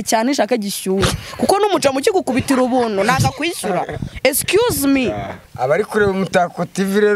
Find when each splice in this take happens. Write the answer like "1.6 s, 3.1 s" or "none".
5.4 s